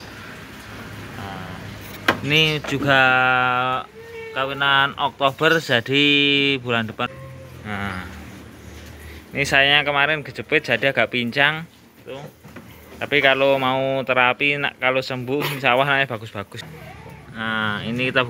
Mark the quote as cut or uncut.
cut